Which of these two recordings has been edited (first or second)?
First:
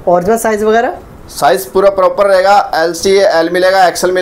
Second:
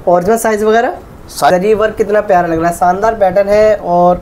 second